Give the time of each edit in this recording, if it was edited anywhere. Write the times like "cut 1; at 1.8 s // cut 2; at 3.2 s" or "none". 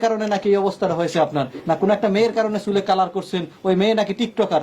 cut 1; at 1.5 s

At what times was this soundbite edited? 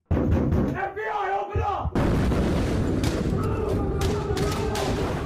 none

